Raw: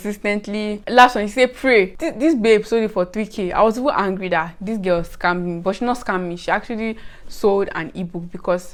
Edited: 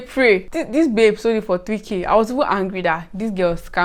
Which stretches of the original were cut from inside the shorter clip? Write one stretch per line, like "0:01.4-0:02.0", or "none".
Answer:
none